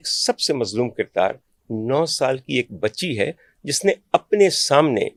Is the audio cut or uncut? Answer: uncut